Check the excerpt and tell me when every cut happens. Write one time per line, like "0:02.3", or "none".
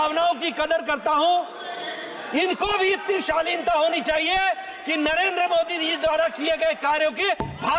none